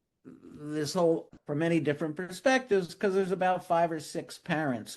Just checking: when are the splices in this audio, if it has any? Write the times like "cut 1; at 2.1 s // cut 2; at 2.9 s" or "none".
cut 1; at 1.4 s